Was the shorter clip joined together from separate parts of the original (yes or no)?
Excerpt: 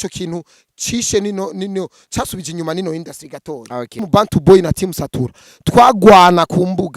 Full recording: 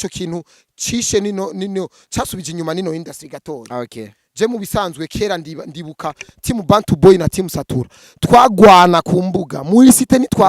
yes